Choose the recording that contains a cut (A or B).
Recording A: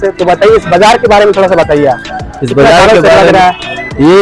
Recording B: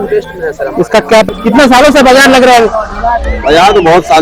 B